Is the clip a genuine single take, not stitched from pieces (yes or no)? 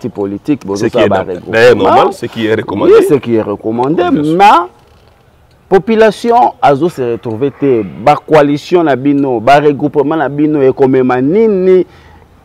yes